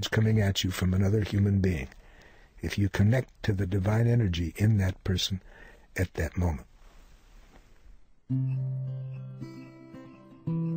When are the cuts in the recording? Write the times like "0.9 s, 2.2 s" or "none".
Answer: 8.2 s